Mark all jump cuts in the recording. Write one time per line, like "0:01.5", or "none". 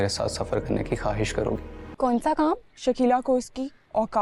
0:01.8